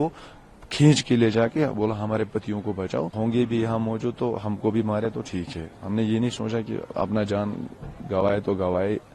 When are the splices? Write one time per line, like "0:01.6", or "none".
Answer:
0:03.1